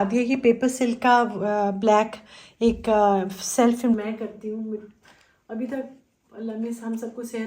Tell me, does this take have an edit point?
yes; 1 cut; at 4.0 s

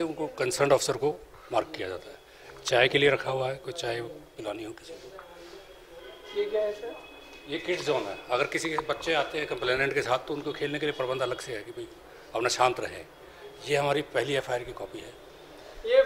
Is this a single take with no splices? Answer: yes; 0 cuts

